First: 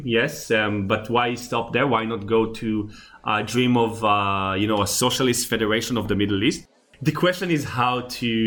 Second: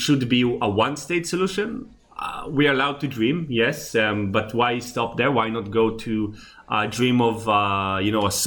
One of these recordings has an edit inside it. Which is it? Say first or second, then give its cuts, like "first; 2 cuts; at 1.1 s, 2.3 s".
first; 1 cut; at 6.7 s